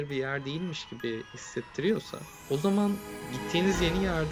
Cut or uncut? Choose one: uncut